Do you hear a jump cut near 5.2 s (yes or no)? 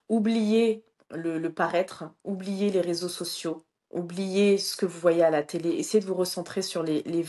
no